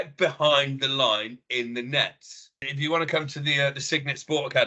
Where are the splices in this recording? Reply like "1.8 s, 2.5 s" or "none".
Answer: 2.6 s